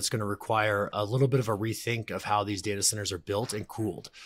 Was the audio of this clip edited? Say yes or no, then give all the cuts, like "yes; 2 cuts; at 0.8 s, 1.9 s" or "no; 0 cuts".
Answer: yes; 1 cut; at 0.9 s